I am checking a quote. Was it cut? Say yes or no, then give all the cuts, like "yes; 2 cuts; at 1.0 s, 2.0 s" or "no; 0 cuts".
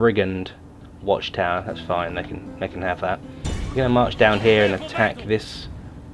yes; 1 cut; at 2.7 s